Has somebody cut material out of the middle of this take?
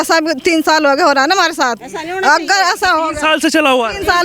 no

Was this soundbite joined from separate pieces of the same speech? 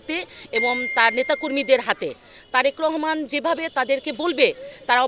no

